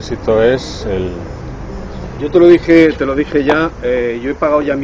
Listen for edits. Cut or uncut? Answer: uncut